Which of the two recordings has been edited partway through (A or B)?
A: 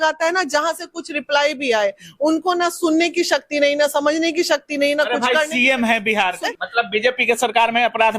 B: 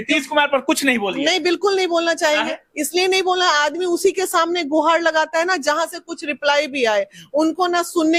A